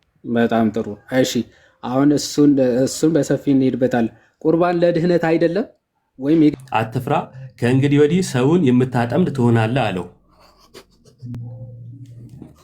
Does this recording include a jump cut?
yes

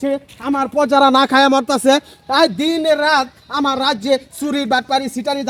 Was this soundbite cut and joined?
no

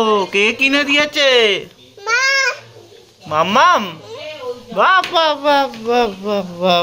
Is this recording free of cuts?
yes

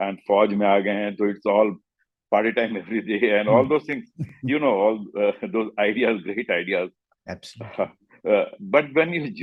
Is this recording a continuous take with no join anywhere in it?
yes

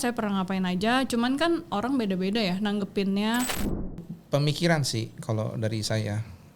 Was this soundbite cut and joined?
yes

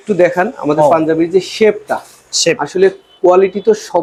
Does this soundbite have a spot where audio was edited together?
no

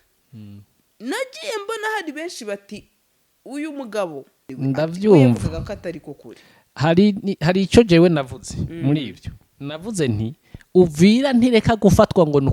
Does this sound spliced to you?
yes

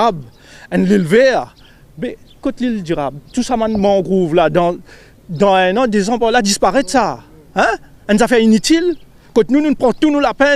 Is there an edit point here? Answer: no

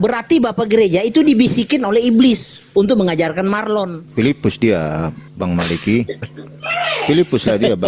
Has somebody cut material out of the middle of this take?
yes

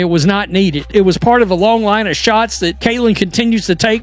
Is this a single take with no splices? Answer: no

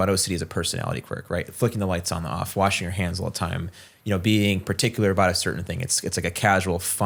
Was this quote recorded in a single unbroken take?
yes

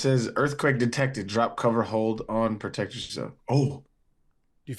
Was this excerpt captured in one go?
yes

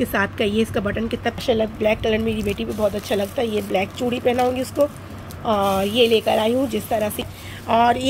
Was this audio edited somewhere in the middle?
yes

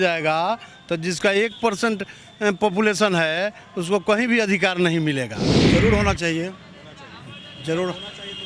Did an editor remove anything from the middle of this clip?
yes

